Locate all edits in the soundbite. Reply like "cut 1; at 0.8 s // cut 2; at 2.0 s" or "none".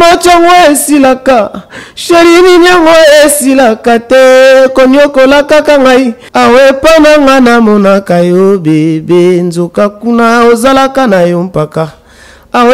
cut 1; at 6.2 s